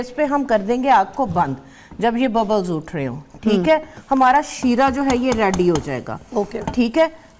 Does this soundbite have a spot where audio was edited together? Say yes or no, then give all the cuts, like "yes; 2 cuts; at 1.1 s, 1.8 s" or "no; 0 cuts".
yes; 1 cut; at 3.9 s